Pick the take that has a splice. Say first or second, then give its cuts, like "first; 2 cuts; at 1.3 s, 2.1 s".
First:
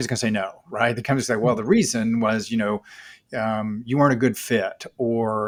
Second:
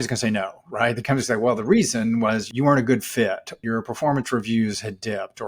second; 2 cuts; at 2.5 s, 3.5 s